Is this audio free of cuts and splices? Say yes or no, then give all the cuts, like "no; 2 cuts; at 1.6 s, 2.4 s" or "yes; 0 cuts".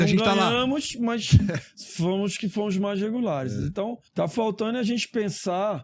no; 1 cut; at 4.0 s